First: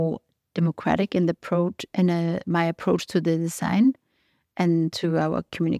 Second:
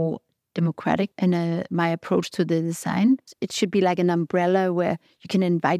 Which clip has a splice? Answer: second; 2 cuts; at 1.1 s, 3.4 s

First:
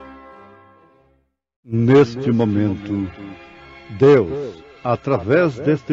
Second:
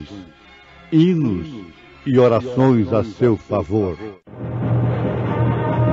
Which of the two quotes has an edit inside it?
first; 1 cut; at 1.7 s

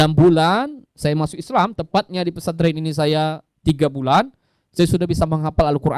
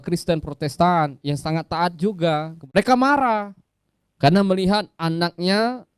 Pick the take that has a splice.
second; 1 cut; at 2.7 s

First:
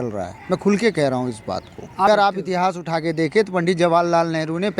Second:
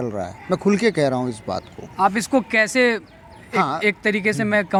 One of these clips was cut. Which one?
first; 1 cut; at 2.1 s

